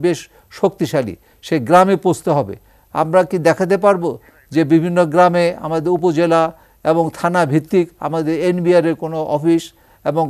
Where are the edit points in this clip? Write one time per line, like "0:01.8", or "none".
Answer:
none

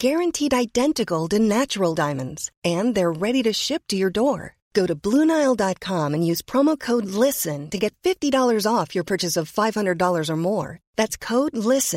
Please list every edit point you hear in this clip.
none

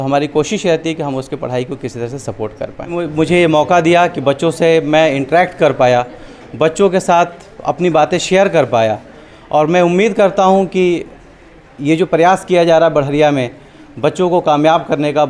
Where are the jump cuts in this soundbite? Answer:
0:03.0

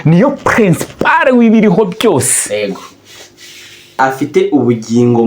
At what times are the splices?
0:04.0

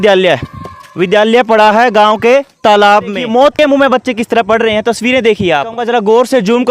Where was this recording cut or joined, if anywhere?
0:03.5
0:05.8

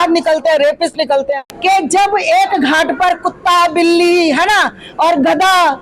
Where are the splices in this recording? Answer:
0:01.4

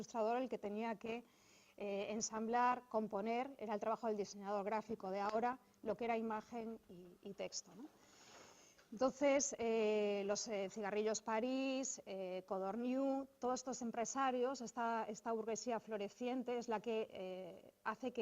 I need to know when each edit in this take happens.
0:05.5

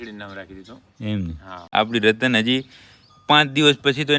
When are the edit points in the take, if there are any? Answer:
0:01.6

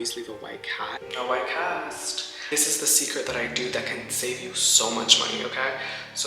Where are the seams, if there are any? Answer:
0:01.0

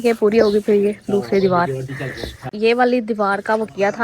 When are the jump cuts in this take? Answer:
0:02.5

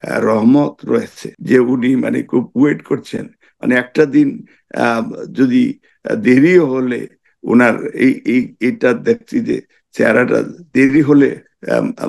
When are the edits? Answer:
0:01.2

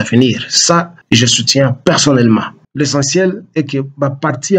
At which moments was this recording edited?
0:00.9
0:02.6

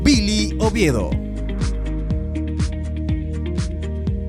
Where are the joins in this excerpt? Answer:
none

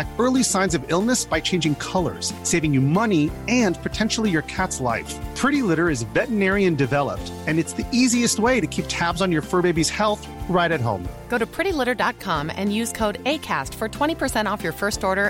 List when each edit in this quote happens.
none

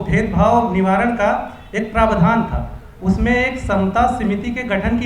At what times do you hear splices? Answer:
none

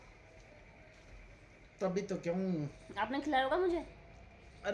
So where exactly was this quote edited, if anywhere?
none

